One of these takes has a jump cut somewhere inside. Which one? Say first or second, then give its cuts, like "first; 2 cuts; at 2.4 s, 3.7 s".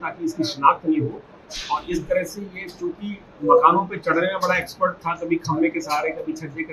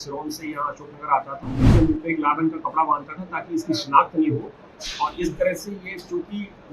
second; 1 cut; at 1.7 s